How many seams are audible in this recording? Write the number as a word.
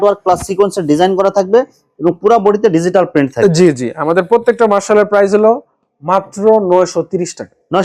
zero